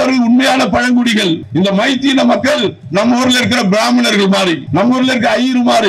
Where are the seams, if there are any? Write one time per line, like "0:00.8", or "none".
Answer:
0:01.4
0:04.6